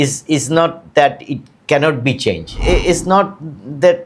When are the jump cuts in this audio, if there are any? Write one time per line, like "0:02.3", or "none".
0:02.6